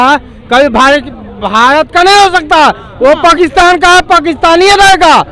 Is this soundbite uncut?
yes; 0 cuts

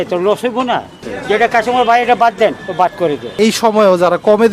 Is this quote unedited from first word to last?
no; 2 cuts; at 1.0 s, 3.3 s

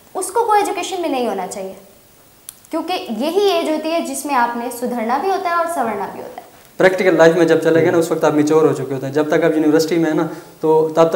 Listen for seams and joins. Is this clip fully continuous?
no; 1 cut; at 6.6 s

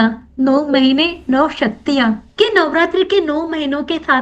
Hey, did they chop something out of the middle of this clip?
yes; 1 cut; at 2.2 s

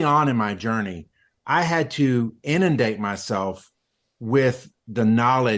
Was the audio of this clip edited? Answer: no; 0 cuts

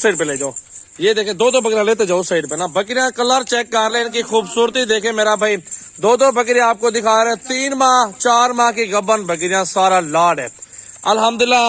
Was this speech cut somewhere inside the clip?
no; 0 cuts

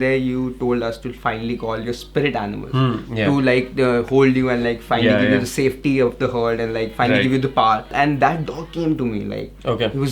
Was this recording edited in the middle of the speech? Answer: yes; 1 cut; at 7.9 s

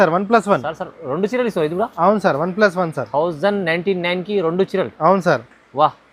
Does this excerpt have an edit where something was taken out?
no; 0 cuts

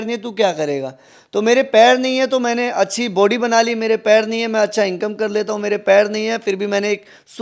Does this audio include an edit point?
no; 0 cuts

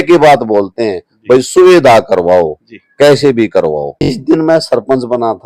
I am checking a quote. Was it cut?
yes; 1 cut; at 4.2 s

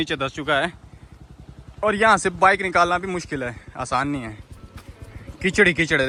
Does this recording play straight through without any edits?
yes; 0 cuts

